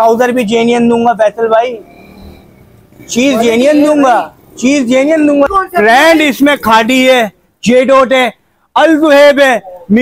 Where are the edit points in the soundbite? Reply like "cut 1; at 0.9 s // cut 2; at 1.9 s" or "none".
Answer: cut 1; at 5.5 s